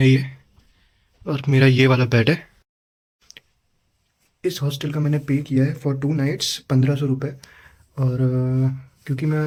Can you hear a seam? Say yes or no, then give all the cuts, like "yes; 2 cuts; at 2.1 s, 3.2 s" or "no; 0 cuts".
no; 0 cuts